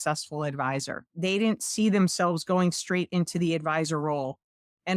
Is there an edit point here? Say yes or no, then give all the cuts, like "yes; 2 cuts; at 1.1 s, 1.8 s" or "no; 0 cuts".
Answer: yes; 1 cut; at 1.1 s